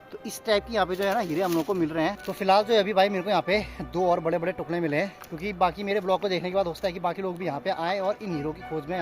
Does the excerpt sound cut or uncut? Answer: cut